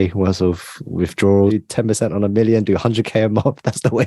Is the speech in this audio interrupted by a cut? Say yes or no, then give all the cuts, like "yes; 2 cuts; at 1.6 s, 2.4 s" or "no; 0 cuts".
yes; 1 cut; at 1.5 s